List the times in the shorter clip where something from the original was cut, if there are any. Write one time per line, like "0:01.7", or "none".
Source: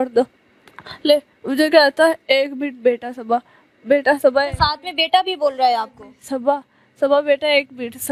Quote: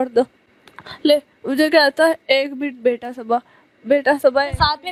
none